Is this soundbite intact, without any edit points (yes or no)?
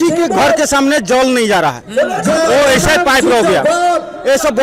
yes